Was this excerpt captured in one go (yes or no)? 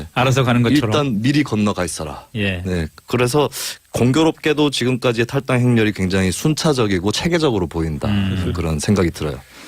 no